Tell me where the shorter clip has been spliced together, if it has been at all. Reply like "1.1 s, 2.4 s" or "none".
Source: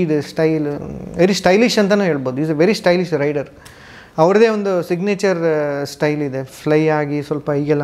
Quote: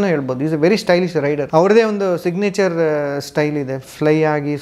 1.4 s